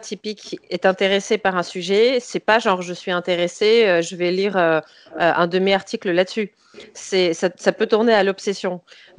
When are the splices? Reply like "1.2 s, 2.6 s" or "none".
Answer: none